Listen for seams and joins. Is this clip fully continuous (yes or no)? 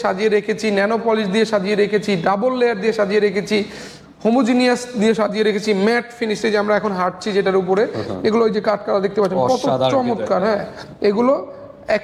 yes